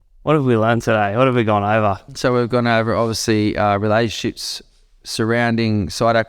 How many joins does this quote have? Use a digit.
1